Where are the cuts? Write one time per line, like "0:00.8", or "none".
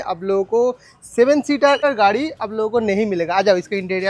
0:01.8